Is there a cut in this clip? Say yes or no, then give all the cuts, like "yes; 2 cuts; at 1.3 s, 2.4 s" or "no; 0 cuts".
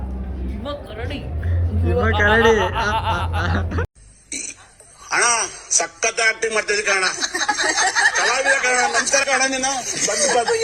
no; 0 cuts